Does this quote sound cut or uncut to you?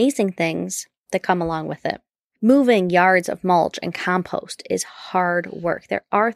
cut